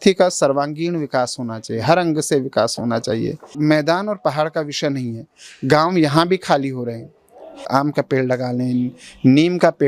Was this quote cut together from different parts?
yes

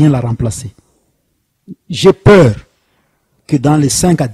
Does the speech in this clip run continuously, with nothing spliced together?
yes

